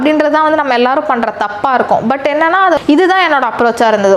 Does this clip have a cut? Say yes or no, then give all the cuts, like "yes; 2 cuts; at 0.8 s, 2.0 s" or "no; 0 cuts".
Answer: yes; 1 cut; at 2.8 s